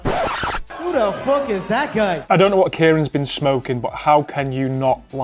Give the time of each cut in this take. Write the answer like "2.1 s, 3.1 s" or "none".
none

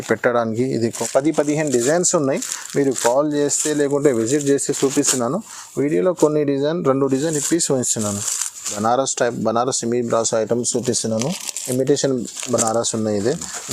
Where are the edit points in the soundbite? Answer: 1.0 s, 8.8 s

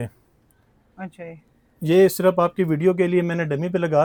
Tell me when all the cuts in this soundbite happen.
none

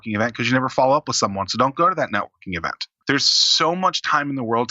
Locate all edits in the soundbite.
2.9 s

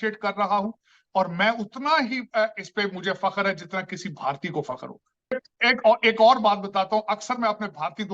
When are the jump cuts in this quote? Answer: none

